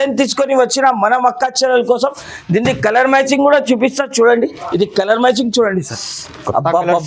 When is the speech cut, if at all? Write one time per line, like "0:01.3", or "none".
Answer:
none